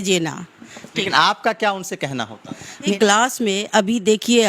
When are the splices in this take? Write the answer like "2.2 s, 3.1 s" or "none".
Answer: 2.9 s